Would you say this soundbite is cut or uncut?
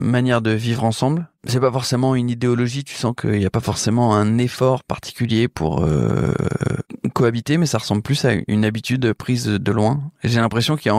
cut